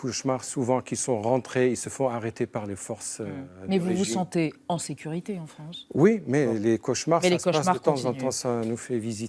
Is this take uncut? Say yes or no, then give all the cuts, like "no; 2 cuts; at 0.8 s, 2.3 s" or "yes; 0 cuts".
yes; 0 cuts